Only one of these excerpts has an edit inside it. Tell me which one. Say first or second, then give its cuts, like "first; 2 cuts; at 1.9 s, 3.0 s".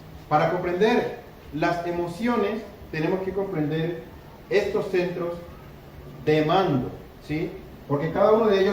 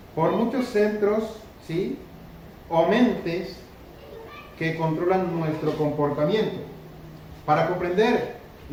first; 1 cut; at 5.0 s